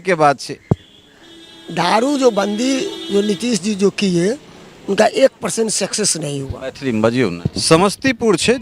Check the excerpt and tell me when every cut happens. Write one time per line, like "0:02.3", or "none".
0:07.5